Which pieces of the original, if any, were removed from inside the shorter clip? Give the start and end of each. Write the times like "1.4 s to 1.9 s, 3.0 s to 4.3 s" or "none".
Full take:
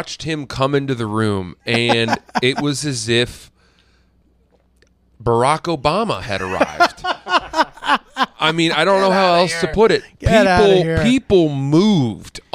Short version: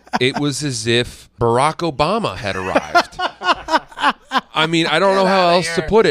3.4 s to 5.1 s